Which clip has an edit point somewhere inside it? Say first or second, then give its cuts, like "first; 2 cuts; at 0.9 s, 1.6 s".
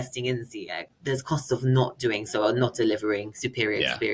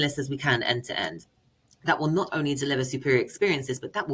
first; 1 cut; at 0.9 s